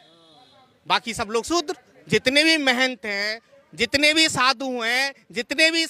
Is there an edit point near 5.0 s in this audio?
no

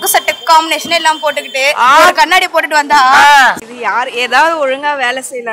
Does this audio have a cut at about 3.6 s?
yes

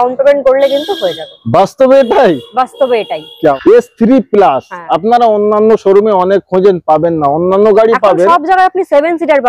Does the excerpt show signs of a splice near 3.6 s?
yes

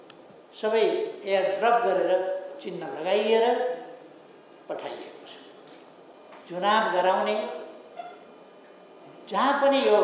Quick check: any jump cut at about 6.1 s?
yes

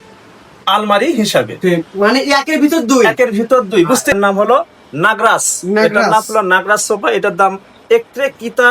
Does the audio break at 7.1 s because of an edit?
no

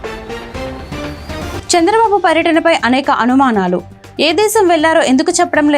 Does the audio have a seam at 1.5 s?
yes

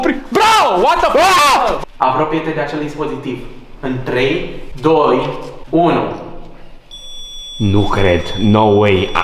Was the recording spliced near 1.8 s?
yes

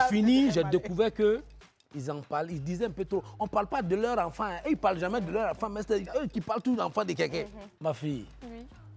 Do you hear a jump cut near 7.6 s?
yes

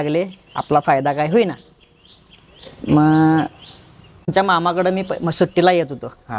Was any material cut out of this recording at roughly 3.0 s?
no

